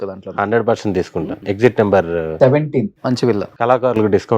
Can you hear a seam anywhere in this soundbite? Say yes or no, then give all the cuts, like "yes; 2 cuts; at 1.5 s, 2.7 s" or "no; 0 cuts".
yes; 2 cuts; at 1.4 s, 3.5 s